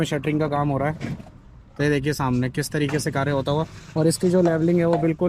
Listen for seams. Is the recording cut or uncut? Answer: uncut